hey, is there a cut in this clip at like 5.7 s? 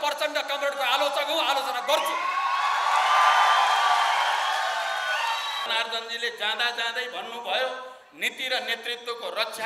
yes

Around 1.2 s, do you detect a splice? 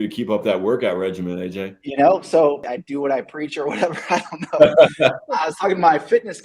no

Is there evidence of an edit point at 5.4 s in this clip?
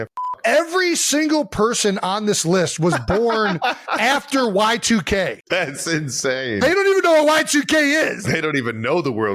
yes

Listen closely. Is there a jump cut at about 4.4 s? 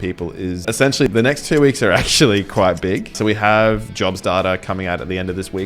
no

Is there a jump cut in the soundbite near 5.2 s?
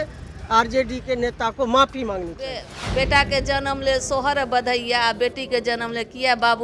no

